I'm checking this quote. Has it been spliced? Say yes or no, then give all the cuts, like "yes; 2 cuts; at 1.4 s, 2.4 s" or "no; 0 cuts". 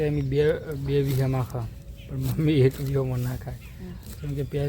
no; 0 cuts